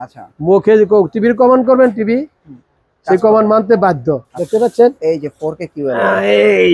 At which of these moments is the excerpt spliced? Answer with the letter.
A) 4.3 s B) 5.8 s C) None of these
A